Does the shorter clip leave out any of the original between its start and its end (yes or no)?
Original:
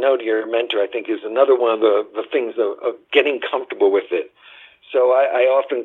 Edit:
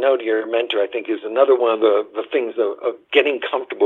no